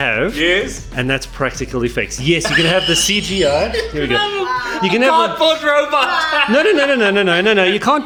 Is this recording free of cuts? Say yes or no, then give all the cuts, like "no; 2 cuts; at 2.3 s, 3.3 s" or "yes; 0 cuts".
yes; 0 cuts